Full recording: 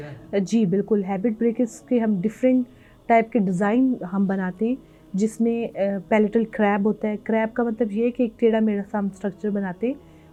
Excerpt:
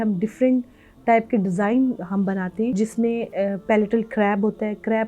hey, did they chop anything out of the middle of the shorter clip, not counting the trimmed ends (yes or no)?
yes